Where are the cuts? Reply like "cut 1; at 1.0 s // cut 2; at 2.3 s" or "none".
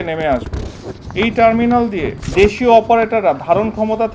cut 1; at 2.2 s